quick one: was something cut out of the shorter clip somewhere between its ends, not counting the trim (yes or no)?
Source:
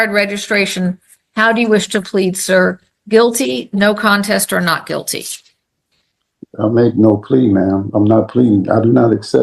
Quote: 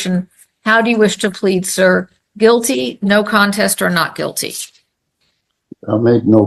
no